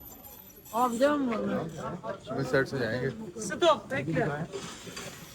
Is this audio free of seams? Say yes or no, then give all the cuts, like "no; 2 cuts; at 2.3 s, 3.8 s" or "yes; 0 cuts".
yes; 0 cuts